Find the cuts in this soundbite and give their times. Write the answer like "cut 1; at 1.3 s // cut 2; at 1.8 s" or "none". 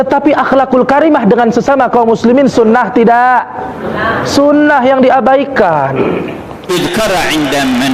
cut 1; at 6.7 s